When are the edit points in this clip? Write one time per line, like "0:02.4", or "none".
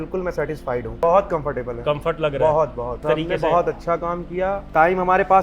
0:01.0
0:03.0
0:04.6